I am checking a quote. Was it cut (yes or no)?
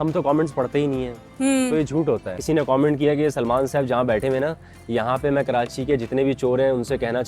yes